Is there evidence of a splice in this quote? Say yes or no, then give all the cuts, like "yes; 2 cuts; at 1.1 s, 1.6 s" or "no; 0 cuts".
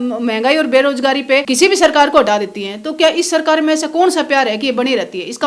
yes; 1 cut; at 1.5 s